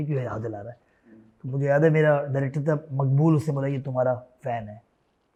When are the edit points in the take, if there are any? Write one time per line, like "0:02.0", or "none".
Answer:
none